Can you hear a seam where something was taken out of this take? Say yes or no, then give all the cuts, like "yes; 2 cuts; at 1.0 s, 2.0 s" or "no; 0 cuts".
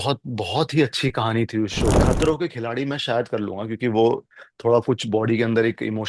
yes; 1 cut; at 2.0 s